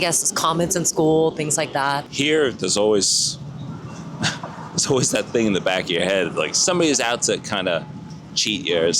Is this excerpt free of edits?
no; 2 cuts; at 2.0 s, 6.6 s

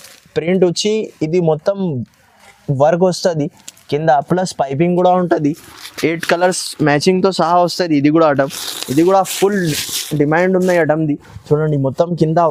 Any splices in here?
no; 0 cuts

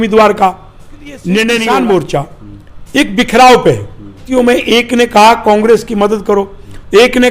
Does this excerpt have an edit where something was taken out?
yes; 2 cuts; at 1.6 s, 4.2 s

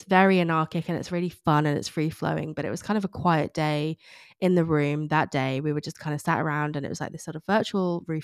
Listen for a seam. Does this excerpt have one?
no; 0 cuts

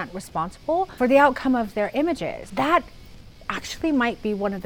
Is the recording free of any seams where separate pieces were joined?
no; 2 cuts; at 0.9 s, 2.4 s

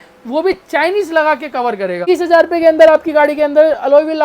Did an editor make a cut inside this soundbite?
yes; 1 cut; at 2.1 s

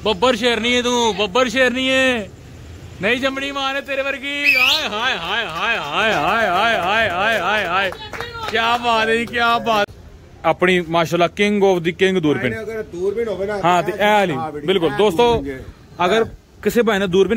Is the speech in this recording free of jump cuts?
no; 1 cut; at 9.9 s

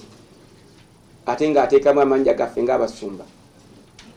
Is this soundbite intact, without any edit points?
yes; 0 cuts

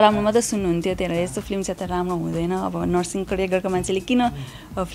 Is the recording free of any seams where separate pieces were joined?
yes; 0 cuts

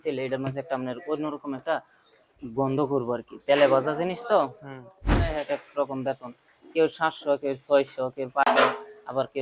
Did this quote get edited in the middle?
yes; 2 cuts; at 5.0 s, 8.5 s

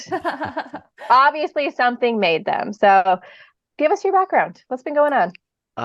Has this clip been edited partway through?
no; 0 cuts

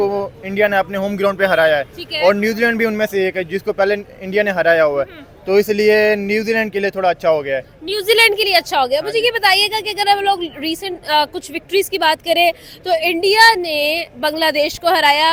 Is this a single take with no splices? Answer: yes; 0 cuts

